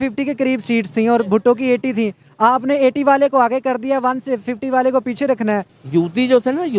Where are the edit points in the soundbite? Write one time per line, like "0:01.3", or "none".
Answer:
0:05.8